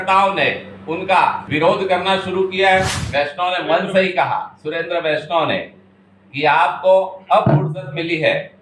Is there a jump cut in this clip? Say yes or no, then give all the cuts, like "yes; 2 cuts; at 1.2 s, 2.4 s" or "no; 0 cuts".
yes; 2 cuts; at 1.4 s, 3.0 s